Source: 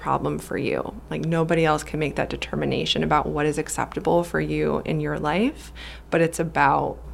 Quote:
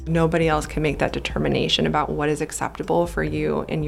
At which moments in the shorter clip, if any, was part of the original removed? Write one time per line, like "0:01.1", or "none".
none